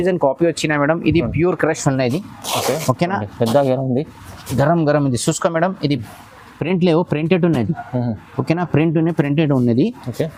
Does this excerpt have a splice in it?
no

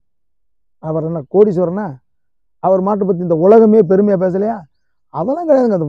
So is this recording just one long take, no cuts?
yes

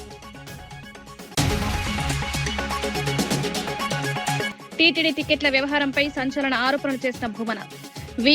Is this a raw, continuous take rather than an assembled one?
no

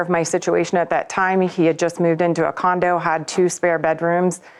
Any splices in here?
no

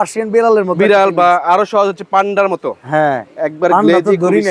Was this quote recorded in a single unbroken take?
yes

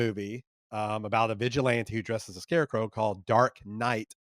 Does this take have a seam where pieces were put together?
no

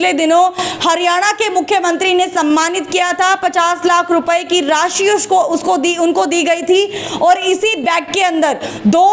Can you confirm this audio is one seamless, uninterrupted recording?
yes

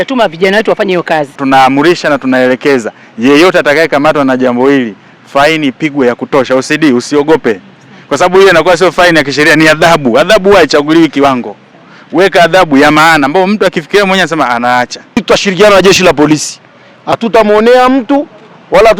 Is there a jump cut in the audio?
yes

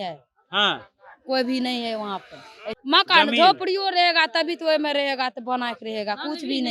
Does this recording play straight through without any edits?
no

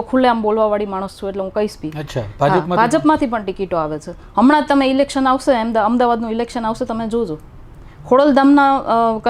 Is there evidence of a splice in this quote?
no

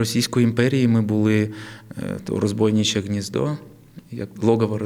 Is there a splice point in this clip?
no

